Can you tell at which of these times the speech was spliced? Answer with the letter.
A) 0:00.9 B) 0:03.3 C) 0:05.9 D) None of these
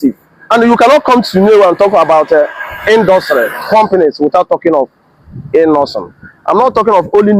D